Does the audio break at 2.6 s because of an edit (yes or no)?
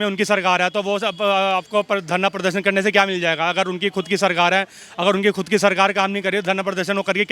no